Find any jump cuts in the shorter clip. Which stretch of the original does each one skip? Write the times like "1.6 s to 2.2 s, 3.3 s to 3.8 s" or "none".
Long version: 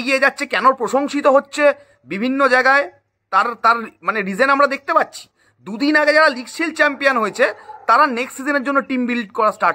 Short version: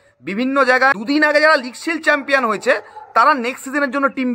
2.8 s to 5.6 s